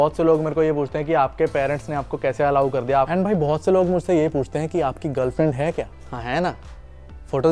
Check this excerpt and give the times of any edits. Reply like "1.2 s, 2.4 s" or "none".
3.1 s, 6.0 s